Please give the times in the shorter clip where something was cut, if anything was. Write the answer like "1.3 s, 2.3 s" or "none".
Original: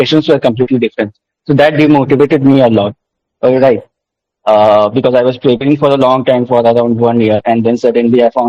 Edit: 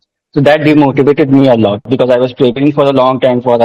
1.9 s